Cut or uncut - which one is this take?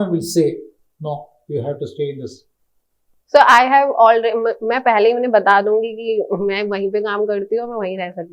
uncut